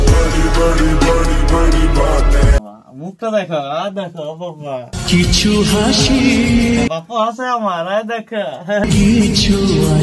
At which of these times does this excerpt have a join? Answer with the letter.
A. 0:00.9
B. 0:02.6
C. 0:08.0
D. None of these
B